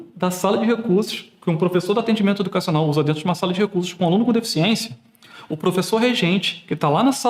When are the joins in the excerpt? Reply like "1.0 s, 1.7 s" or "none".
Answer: none

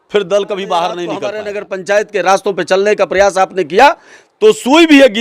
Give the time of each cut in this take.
1.4 s

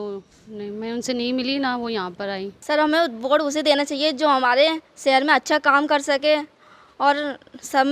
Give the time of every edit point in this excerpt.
2.5 s

